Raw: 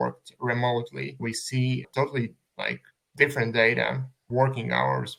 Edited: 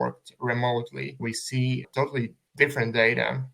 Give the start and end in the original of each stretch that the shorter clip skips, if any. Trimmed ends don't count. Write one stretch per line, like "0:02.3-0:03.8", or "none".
0:02.4-0:03.0